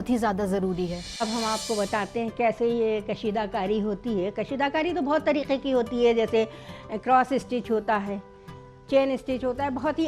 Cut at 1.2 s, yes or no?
yes